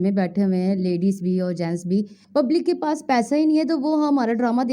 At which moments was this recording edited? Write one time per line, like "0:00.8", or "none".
0:02.2